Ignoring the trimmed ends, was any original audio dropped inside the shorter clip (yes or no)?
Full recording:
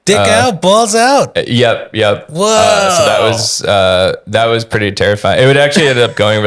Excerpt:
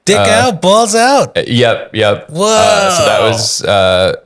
no